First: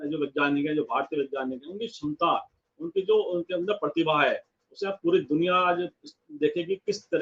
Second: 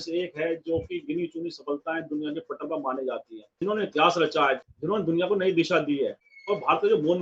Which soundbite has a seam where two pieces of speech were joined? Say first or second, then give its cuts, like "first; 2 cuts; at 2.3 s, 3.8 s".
second; 3 cuts; at 3.6 s, 4.6 s, 6.3 s